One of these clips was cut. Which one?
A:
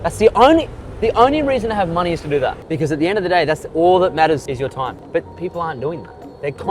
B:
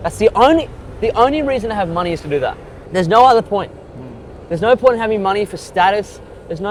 A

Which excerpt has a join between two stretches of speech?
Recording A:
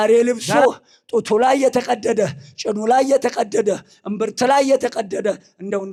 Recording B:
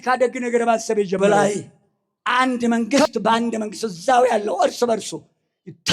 B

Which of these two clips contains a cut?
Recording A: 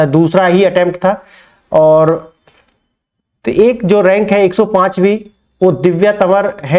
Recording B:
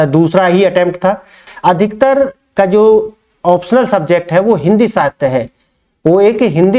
B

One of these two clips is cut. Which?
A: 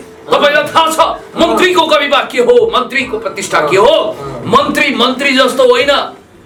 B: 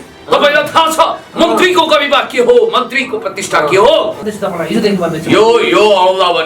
B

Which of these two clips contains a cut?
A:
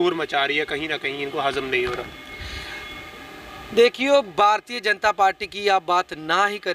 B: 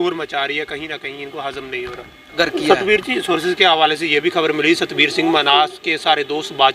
B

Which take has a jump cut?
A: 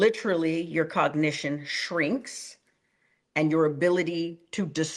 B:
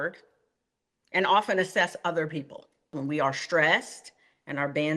B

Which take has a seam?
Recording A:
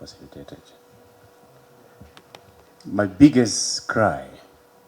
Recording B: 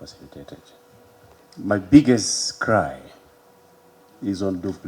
B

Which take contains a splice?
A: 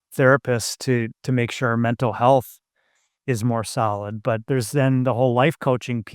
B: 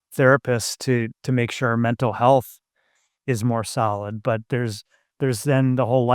A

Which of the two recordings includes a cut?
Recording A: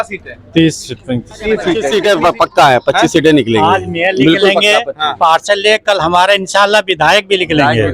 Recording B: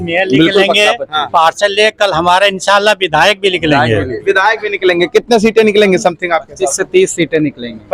A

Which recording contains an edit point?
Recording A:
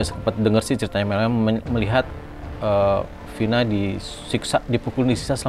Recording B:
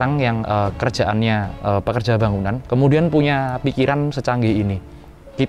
B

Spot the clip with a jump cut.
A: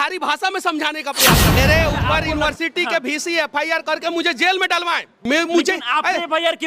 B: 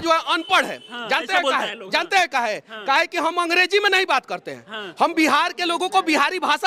A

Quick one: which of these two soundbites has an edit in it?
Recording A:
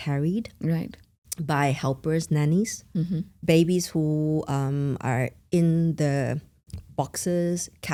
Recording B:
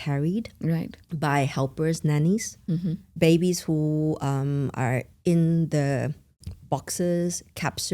B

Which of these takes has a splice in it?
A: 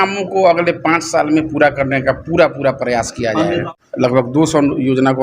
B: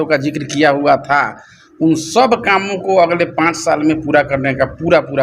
A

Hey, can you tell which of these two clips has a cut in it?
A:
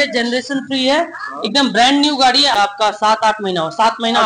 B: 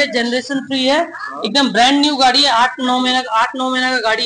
A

